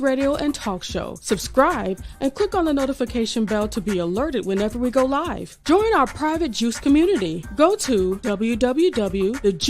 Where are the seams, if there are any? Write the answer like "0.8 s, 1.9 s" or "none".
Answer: 1.0 s